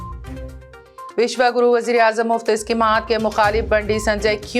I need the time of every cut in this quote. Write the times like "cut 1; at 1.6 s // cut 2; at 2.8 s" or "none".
none